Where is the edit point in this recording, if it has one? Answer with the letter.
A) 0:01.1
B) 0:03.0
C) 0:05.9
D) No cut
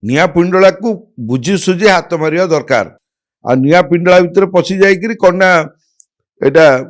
D